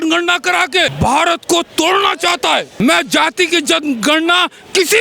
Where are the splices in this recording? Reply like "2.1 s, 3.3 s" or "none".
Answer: 0.9 s, 2.7 s